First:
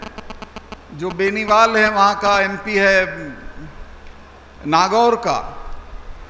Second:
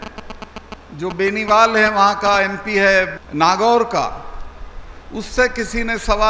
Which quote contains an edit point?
second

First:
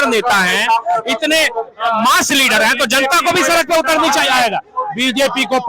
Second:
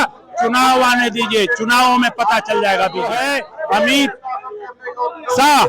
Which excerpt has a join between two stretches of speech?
second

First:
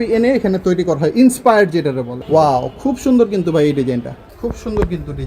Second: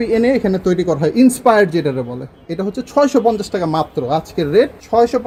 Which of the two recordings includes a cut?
first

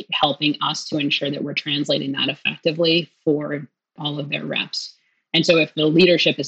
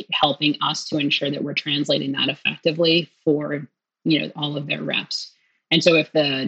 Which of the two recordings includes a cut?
first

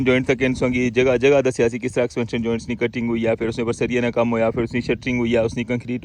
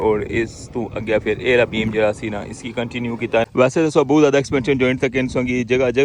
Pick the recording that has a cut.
second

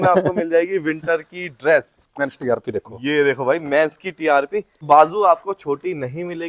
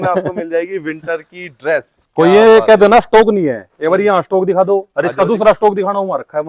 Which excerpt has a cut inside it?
first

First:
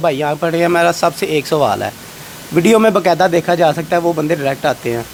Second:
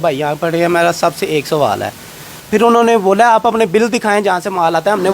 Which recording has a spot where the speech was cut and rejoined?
second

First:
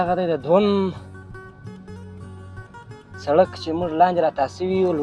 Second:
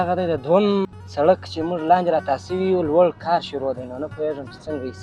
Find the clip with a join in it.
second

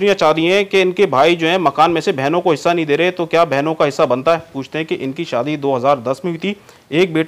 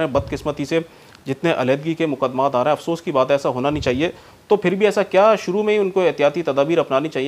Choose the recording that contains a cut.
first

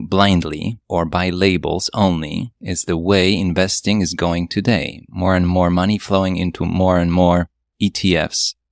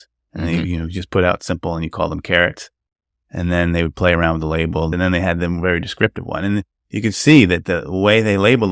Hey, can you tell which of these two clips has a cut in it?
second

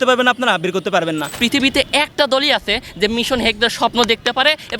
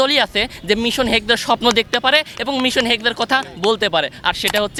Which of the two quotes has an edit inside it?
first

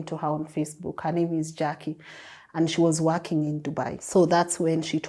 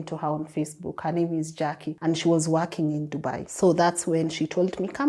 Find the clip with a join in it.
second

